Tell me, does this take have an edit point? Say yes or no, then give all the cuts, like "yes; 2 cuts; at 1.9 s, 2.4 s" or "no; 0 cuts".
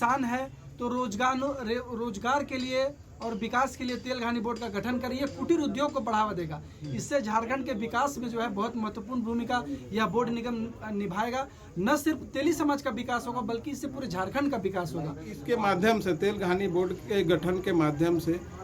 yes; 1 cut; at 15.3 s